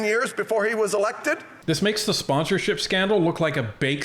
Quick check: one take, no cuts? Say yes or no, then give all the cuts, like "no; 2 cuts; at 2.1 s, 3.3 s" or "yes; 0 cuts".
no; 1 cut; at 1.5 s